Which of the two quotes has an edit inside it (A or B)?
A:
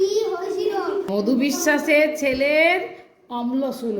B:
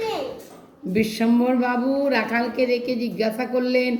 A